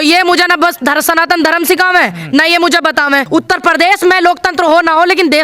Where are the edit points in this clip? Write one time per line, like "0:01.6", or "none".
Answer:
0:03.2